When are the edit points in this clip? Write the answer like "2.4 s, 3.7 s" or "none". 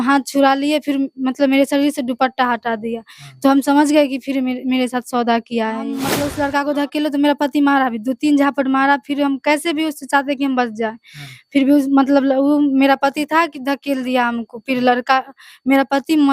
6.2 s